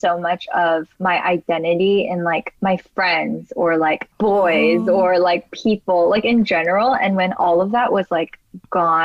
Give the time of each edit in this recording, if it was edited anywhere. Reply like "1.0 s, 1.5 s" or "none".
0.9 s, 2.5 s, 4.1 s